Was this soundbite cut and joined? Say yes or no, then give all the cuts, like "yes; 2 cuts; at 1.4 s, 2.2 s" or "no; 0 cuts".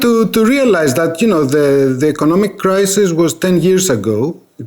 no; 0 cuts